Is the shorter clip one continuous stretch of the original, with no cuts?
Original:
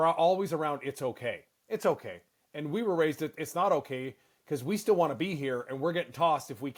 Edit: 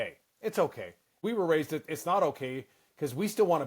no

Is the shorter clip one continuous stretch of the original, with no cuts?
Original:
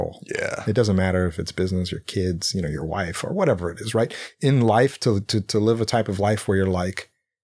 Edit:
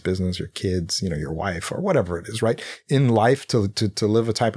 yes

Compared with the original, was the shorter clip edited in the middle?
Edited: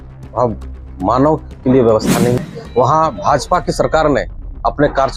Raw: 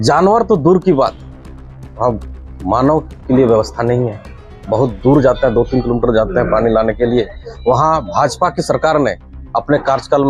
yes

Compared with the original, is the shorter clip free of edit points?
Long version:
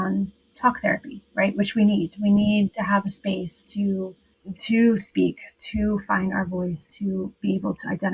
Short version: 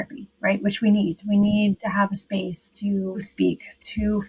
no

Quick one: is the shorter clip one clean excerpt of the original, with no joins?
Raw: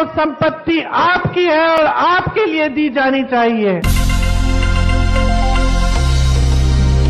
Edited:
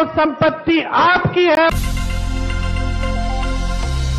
no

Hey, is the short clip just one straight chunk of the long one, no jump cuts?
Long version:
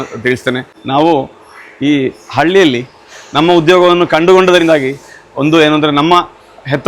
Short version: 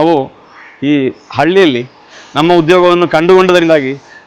yes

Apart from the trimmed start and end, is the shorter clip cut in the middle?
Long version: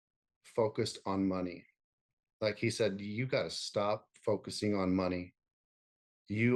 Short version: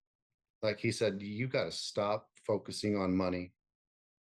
no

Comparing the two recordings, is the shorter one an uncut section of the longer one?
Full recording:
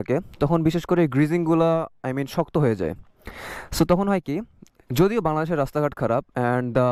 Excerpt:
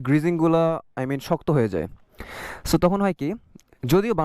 yes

